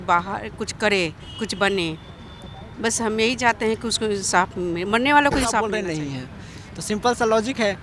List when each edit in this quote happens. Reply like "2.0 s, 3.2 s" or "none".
5.7 s